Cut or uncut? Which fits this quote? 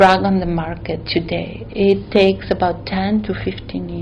uncut